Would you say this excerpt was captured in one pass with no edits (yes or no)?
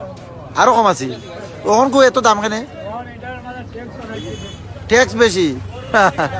yes